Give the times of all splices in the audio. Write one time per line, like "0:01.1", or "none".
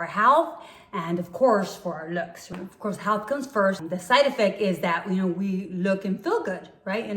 0:02.5
0:03.8